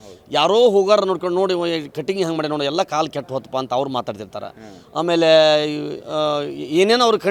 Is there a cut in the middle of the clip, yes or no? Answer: no